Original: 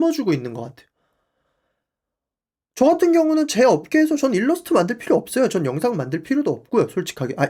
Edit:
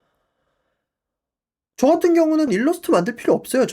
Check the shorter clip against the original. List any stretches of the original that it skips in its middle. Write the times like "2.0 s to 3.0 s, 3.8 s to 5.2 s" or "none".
3.5 s to 4.3 s